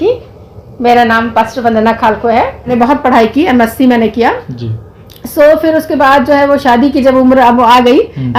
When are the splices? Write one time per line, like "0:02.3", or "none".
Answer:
0:02.7